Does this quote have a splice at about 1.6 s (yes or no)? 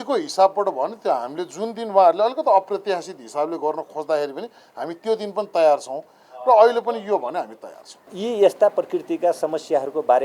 no